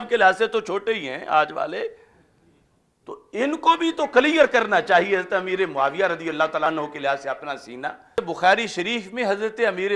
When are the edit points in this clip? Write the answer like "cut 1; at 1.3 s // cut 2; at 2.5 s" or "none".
cut 1; at 6.7 s // cut 2; at 8.2 s

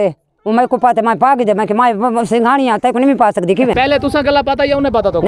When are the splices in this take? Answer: cut 1; at 3.7 s

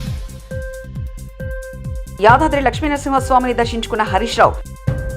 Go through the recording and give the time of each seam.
cut 1; at 1.9 s

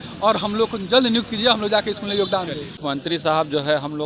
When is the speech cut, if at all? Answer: cut 1; at 2.7 s

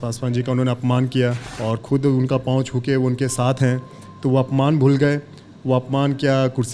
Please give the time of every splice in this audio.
cut 1; at 1.5 s

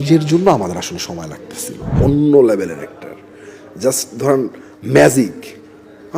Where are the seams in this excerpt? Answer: cut 1; at 2.0 s

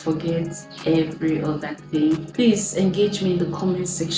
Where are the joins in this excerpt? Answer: cut 1; at 2.3 s

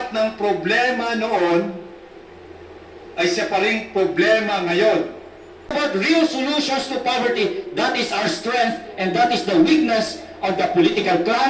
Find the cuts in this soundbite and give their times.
cut 1; at 5.7 s

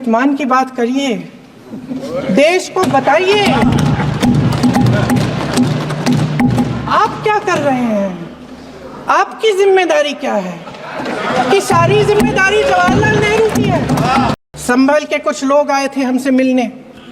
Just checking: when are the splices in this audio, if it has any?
cut 1; at 14.4 s

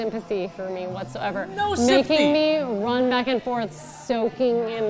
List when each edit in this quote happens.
none

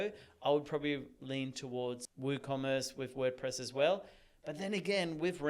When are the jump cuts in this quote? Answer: cut 1; at 2.1 s

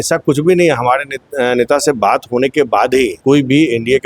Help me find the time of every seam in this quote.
cut 1; at 3.2 s

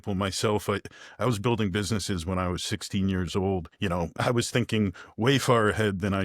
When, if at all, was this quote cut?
cut 1; at 4.0 s

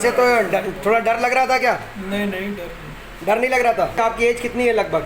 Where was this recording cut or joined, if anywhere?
cut 1; at 4.0 s

